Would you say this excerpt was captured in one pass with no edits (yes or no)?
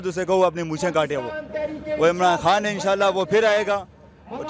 yes